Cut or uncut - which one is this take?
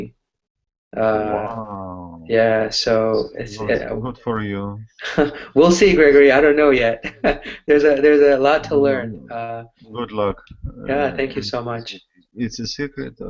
uncut